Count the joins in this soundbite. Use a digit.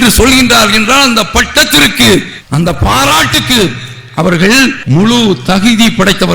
1